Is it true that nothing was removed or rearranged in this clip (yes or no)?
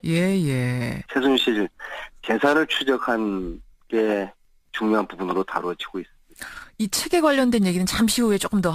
yes